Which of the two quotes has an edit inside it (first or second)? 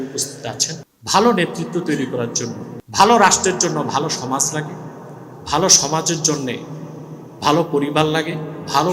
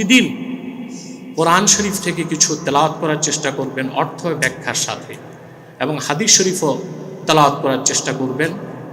first